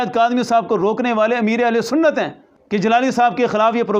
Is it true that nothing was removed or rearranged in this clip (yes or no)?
yes